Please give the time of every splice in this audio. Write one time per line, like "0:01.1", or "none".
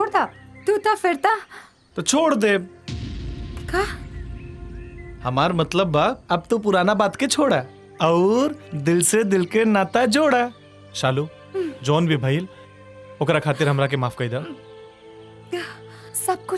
none